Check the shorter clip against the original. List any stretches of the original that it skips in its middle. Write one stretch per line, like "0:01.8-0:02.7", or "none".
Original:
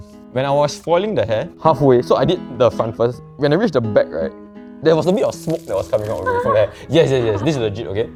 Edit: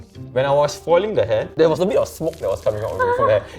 0:01.5-0:04.7